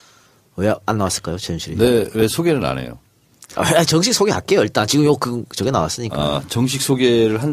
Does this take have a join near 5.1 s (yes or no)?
no